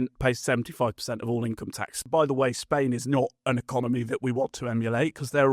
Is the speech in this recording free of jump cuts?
no; 1 cut; at 2.0 s

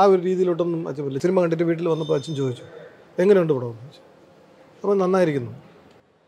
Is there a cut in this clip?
yes; 1 cut; at 1.2 s

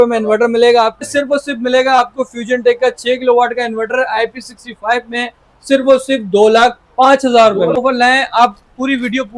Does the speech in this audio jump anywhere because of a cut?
yes; 2 cuts; at 1.1 s, 7.8 s

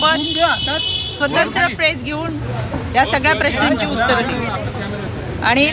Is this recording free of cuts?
yes; 0 cuts

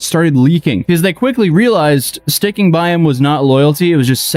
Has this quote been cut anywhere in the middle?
no; 0 cuts

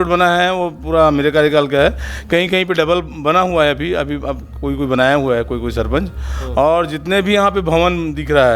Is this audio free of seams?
yes; 0 cuts

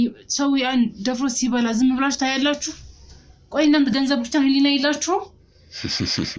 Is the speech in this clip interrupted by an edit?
no; 0 cuts

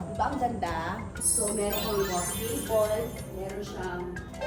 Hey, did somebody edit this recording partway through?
no; 0 cuts

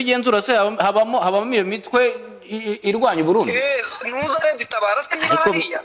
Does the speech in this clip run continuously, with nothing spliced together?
yes; 0 cuts

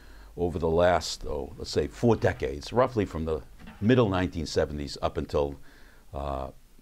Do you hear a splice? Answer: yes; 1 cut; at 3.3 s

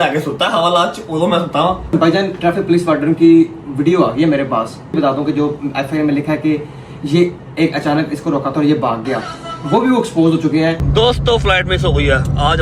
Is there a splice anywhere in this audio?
yes; 3 cuts; at 1.9 s, 5.0 s, 10.8 s

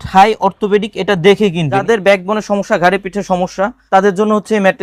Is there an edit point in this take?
yes; 2 cuts; at 1.8 s, 3.8 s

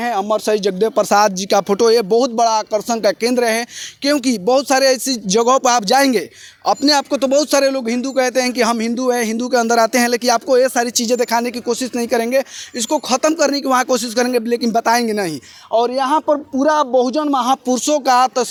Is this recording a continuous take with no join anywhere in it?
yes; 0 cuts

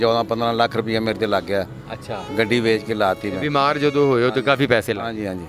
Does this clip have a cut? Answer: no; 0 cuts

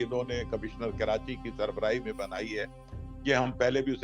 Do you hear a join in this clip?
no; 0 cuts

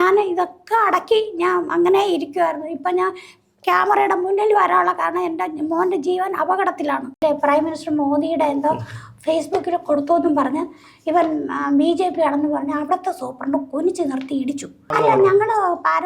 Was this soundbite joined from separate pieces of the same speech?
yes; 2 cuts; at 7.2 s, 14.9 s

